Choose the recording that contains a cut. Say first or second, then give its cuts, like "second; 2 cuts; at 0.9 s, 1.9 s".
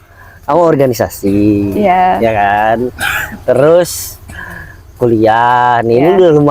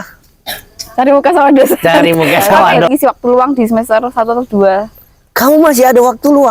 second; 1 cut; at 2.8 s